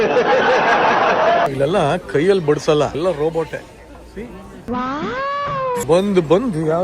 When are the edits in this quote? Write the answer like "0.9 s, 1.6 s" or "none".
1.5 s, 3.0 s, 5.8 s